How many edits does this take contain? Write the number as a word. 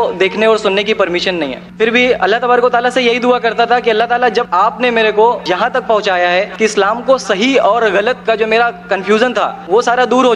one